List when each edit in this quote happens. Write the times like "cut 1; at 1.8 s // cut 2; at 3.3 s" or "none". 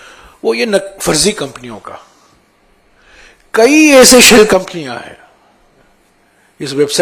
none